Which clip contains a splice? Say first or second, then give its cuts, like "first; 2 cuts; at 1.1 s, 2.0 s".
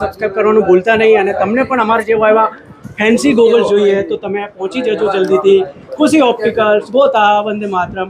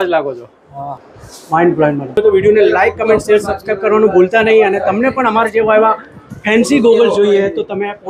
second; 2 cuts; at 0.9 s, 2.2 s